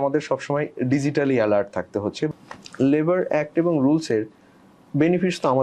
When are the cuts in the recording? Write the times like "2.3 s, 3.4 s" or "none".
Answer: 2.3 s